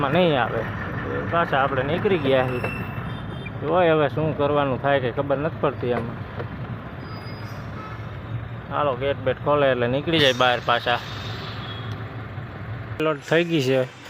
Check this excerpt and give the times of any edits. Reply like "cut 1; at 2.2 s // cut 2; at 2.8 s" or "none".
cut 1; at 13.0 s